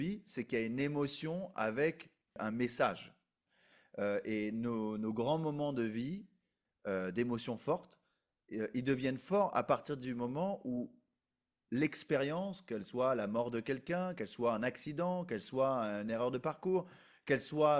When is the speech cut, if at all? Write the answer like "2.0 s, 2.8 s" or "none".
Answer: 2.4 s